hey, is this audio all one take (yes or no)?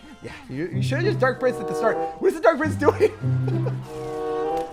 yes